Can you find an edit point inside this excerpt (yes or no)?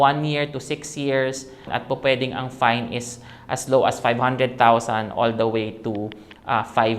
yes